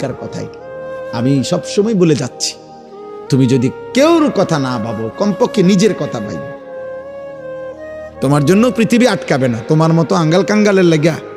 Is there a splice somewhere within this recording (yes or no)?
yes